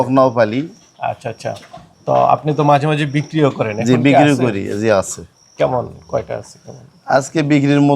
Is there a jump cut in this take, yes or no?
no